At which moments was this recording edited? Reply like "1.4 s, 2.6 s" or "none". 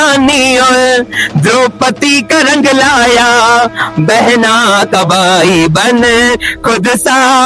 none